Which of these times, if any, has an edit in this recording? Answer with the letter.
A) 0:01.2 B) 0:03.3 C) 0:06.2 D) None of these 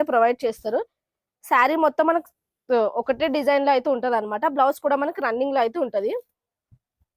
D